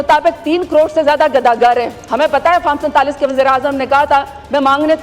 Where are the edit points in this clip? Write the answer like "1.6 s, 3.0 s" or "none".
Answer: none